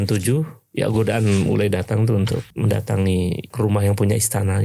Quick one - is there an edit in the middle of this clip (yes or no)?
yes